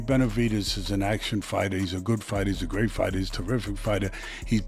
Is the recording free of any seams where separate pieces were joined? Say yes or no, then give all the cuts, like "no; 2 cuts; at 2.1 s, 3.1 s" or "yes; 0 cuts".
yes; 0 cuts